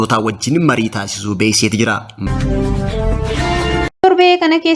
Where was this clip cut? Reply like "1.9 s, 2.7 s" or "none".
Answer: 2.1 s, 4.0 s